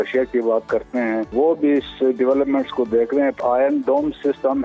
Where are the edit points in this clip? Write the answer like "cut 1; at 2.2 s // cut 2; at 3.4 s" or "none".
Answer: cut 1; at 1.3 s // cut 2; at 3.4 s